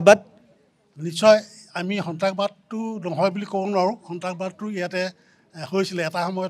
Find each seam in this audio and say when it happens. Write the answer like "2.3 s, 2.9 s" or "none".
none